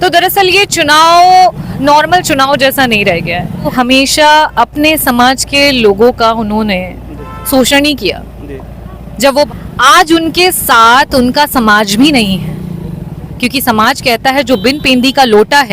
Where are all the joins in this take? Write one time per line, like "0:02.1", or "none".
0:03.7
0:09.5